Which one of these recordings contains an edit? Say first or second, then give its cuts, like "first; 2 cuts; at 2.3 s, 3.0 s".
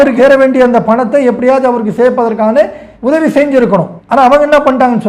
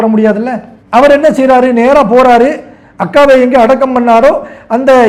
first; 1 cut; at 4.0 s